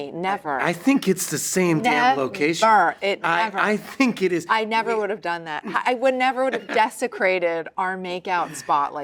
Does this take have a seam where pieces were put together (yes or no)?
no